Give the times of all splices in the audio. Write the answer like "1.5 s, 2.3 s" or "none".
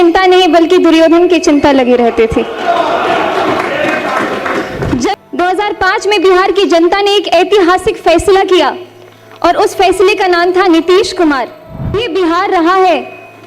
4.9 s, 11.9 s